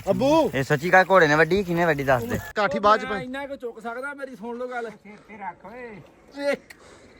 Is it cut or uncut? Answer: cut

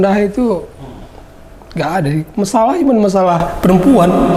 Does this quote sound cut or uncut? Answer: uncut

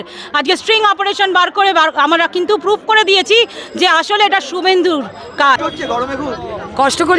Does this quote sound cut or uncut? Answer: cut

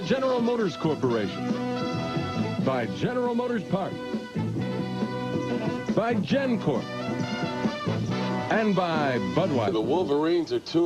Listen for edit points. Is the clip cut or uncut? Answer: uncut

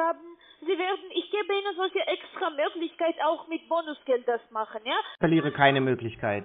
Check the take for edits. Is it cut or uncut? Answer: cut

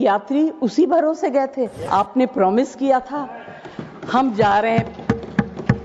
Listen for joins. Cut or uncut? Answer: cut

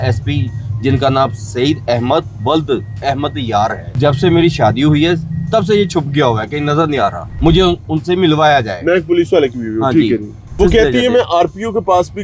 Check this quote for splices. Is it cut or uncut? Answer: cut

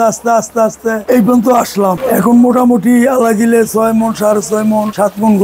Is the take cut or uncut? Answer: cut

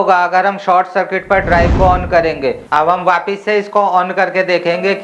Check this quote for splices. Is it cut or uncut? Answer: cut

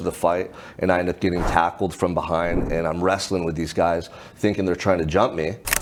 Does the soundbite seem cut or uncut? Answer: uncut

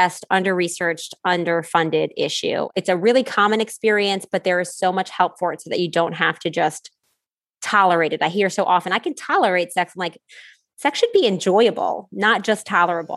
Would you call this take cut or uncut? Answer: cut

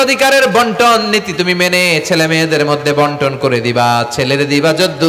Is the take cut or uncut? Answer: uncut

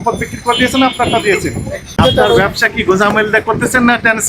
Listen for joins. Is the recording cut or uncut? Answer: cut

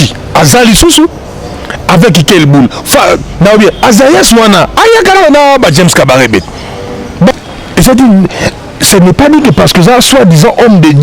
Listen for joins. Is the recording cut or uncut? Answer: cut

